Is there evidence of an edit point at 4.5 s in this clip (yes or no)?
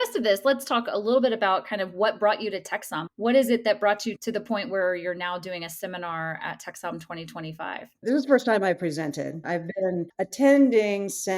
no